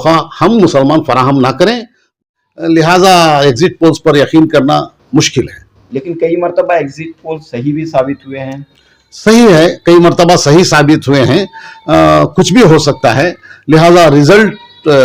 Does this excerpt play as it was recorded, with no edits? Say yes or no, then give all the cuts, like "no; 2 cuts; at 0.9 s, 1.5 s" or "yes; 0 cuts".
no; 1 cut; at 2.1 s